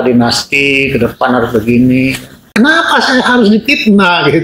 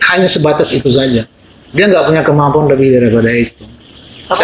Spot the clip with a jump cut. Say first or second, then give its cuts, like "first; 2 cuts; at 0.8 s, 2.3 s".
first; 1 cut; at 2.4 s